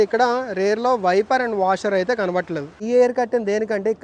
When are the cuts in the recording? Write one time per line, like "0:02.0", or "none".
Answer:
0:02.8